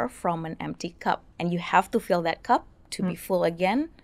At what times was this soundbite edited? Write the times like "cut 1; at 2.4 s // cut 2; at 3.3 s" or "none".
cut 1; at 1.3 s